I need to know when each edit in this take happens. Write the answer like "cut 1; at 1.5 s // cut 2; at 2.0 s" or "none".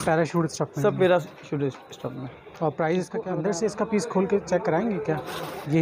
cut 1; at 3.3 s